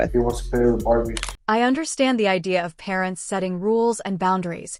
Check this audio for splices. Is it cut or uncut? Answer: uncut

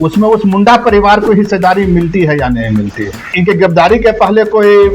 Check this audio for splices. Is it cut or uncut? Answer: cut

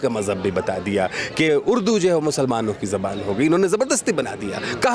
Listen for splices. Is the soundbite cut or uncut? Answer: uncut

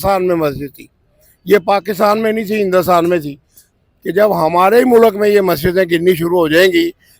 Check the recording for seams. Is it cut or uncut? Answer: cut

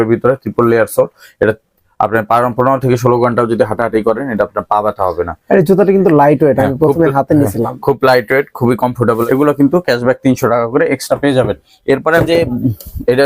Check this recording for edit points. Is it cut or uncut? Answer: cut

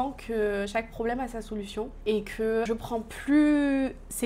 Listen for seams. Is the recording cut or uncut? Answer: cut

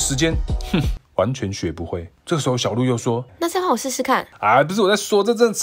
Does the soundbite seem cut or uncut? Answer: uncut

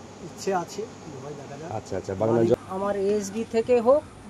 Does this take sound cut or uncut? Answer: cut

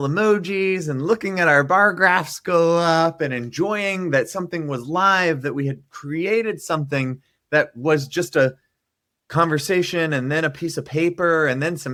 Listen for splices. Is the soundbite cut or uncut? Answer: uncut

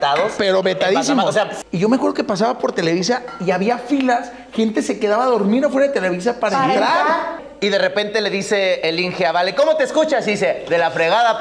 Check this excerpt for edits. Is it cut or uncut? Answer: cut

